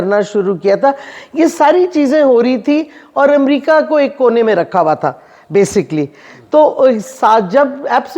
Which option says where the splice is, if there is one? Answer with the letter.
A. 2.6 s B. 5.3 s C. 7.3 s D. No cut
D